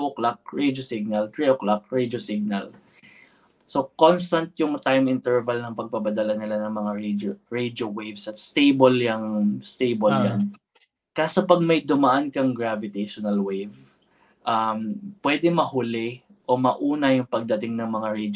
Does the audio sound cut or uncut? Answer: uncut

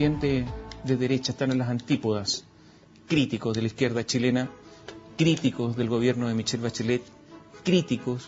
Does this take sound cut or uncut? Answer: uncut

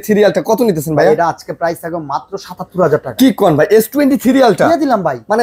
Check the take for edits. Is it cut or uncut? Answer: uncut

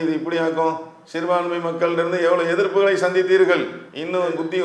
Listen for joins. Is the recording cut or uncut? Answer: uncut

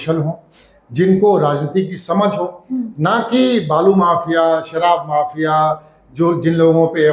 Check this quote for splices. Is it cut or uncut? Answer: uncut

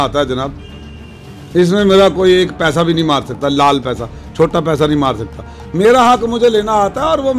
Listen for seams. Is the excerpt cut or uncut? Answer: uncut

